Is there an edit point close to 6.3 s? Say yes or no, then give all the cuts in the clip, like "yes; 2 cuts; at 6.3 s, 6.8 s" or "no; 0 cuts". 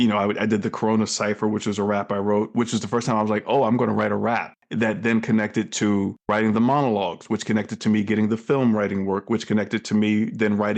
yes; 2 cuts; at 4.6 s, 6.3 s